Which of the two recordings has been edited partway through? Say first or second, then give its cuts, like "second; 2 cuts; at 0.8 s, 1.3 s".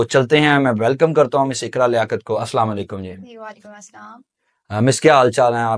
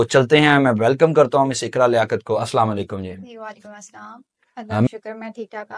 second; 1 cut; at 4.9 s